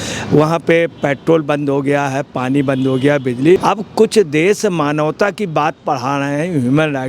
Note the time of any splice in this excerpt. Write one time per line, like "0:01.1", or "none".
0:03.6